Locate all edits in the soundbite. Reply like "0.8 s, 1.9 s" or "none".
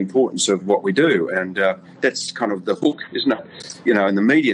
3.5 s